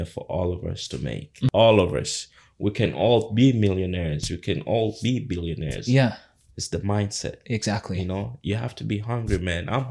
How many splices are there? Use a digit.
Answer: 1